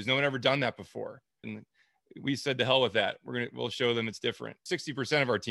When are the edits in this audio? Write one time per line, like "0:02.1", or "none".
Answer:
0:01.4
0:04.6